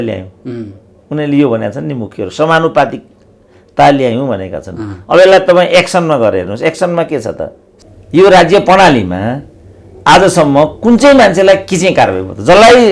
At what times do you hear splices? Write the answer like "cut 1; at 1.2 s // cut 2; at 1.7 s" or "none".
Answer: cut 1; at 7.7 s